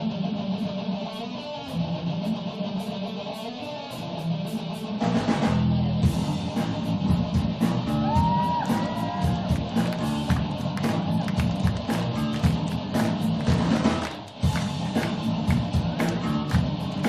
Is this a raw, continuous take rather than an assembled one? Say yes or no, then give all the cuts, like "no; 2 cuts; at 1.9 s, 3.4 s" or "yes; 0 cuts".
yes; 0 cuts